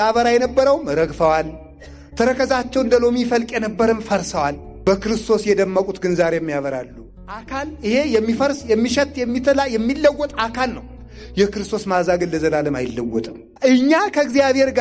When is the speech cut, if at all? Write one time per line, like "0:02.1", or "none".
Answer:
0:04.7
0:07.1
0:13.4